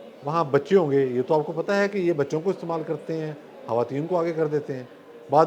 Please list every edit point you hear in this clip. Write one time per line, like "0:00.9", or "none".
none